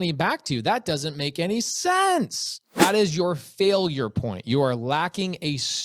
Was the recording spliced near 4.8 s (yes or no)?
no